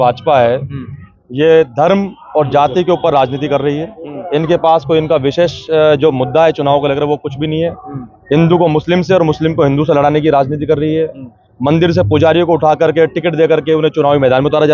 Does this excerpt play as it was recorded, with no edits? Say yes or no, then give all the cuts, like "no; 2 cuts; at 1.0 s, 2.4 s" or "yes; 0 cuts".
yes; 0 cuts